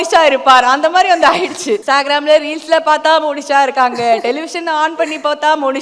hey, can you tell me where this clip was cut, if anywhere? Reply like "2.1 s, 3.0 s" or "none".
1.8 s